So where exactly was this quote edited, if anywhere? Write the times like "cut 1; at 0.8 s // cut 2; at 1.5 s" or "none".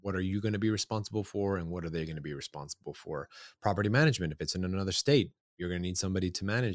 none